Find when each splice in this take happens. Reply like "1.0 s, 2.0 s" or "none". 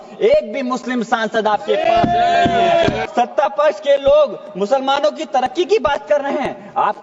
3.0 s

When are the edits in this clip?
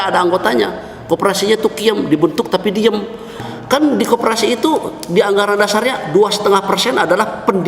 3.3 s

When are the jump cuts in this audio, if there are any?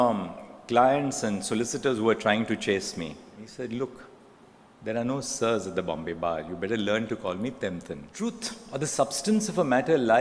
3.5 s, 8.1 s

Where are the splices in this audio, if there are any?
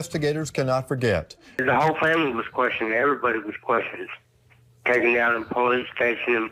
1.6 s

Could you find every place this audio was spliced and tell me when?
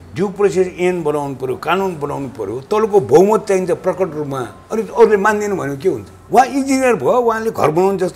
6.1 s

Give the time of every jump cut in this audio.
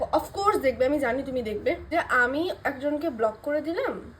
1.8 s

